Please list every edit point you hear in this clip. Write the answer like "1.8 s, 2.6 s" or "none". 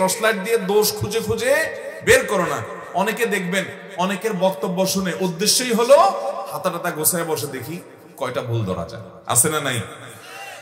9.1 s